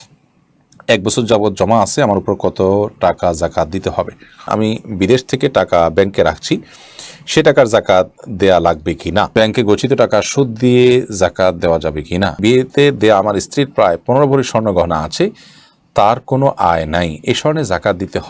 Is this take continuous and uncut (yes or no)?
no